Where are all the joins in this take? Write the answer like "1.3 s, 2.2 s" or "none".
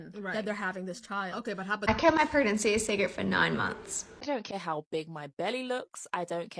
1.8 s, 4.0 s